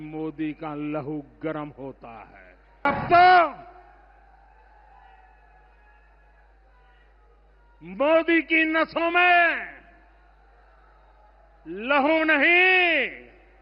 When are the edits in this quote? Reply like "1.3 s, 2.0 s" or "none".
2.9 s